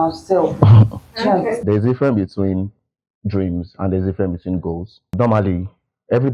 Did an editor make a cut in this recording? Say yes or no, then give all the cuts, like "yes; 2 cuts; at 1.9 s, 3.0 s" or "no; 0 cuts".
yes; 2 cuts; at 1.6 s, 5.1 s